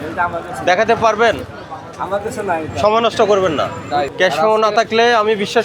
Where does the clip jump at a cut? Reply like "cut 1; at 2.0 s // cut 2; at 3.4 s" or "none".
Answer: cut 1; at 4.1 s